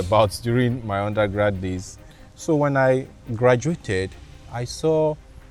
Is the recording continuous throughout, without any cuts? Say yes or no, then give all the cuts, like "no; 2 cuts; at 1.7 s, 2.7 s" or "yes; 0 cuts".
yes; 0 cuts